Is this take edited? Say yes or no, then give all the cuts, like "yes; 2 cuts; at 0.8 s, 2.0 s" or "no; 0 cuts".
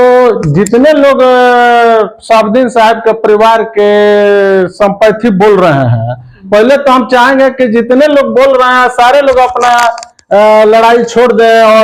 no; 0 cuts